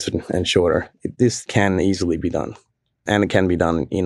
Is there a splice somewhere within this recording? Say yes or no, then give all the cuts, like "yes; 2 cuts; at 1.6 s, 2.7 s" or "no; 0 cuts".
yes; 2 cuts; at 1.2 s, 3.0 s